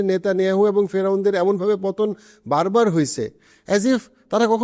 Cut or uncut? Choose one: uncut